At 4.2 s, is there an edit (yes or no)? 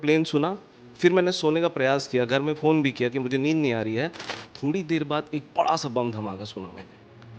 yes